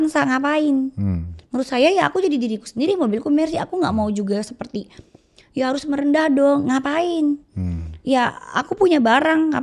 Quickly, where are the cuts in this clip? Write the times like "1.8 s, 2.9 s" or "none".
none